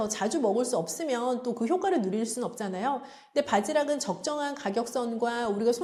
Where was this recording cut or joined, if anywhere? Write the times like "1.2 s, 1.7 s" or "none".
none